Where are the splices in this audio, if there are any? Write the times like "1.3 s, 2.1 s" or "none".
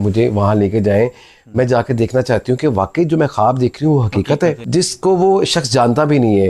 4.6 s